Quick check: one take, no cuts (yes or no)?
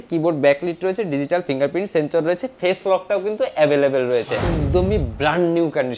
no